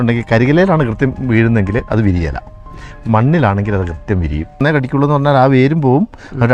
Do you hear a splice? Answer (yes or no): yes